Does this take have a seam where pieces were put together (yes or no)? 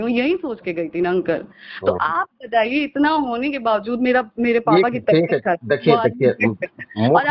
no